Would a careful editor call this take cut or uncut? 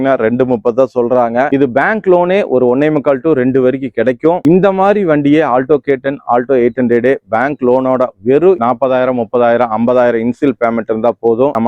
uncut